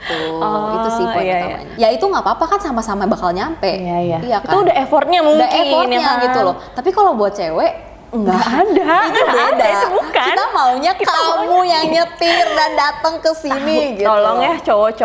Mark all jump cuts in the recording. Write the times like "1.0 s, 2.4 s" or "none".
1.6 s